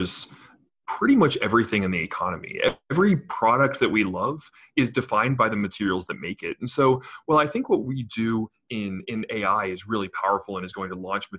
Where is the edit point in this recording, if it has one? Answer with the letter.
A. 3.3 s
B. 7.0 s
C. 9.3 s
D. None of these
D